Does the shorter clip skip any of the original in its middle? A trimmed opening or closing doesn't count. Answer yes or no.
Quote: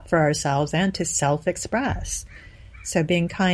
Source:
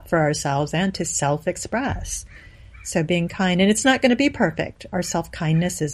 no